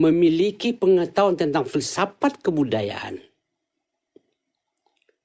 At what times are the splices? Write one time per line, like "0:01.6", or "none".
none